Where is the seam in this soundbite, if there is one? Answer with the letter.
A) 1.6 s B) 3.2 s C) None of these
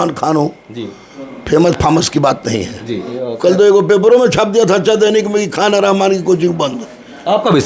B